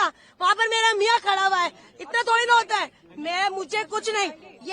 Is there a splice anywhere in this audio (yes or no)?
no